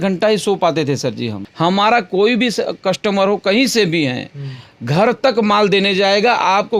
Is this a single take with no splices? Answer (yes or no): no